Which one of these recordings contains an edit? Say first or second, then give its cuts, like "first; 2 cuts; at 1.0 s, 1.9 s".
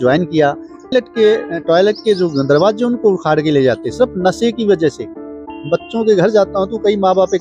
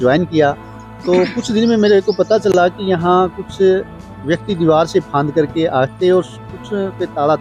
first; 2 cuts; at 0.9 s, 5.5 s